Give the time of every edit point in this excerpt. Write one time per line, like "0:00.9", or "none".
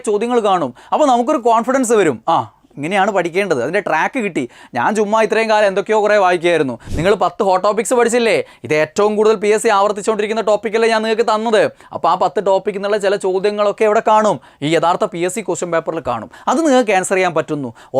0:06.8